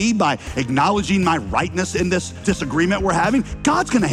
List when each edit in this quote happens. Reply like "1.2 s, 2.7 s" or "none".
2.4 s